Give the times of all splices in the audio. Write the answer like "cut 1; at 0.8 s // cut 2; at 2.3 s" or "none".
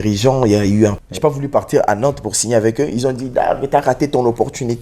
cut 1; at 1.0 s